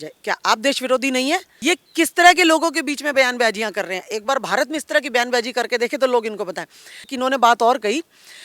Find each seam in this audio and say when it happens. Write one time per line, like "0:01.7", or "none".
0:01.5
0:07.1

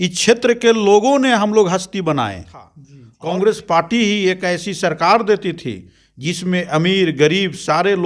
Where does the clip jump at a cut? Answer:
0:03.1

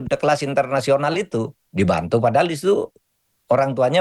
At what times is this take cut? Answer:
0:01.6

